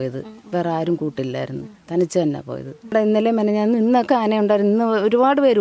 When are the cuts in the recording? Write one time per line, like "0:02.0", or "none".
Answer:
0:02.8